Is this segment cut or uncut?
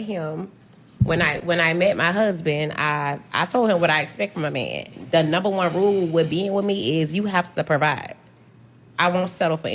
cut